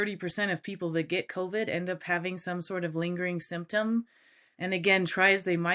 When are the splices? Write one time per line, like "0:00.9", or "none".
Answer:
none